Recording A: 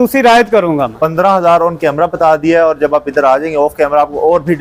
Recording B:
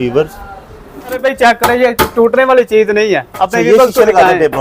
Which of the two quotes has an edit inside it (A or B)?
B